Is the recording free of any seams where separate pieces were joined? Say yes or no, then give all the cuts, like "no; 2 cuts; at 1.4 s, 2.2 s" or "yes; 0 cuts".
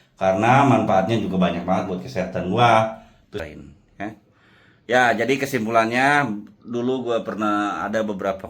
no; 1 cut; at 3.3 s